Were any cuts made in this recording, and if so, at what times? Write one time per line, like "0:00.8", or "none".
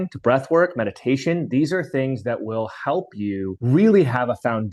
0:03.6